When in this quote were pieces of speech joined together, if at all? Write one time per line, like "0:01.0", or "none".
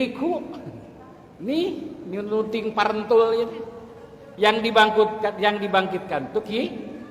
none